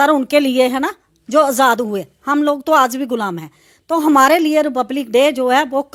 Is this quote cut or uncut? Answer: uncut